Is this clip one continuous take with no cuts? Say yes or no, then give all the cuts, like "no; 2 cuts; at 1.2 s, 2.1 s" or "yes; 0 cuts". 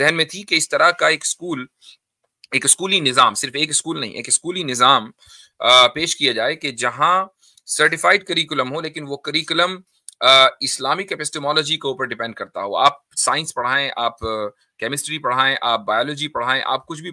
yes; 0 cuts